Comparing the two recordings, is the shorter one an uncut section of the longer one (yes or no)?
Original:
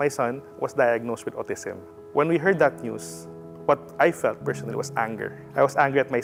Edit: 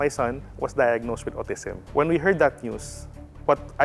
no